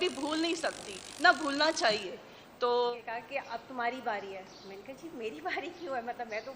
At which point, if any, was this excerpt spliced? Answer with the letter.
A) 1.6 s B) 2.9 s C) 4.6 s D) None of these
B